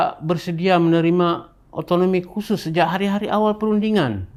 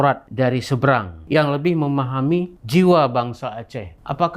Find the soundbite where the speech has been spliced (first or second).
second